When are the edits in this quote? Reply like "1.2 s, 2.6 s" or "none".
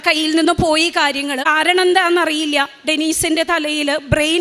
1.4 s